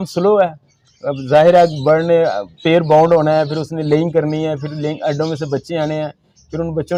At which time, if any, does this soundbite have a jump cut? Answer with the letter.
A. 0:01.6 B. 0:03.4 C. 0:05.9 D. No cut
D